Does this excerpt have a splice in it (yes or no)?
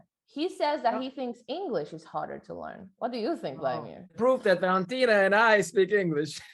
yes